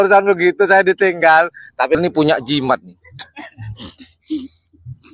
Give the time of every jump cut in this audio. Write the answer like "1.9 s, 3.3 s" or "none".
1.9 s